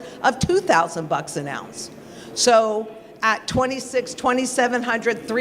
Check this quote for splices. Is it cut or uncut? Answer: uncut